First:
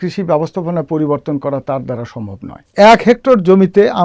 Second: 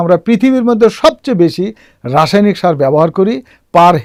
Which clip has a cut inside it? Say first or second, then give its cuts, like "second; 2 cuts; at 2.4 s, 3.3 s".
first; 1 cut; at 2.7 s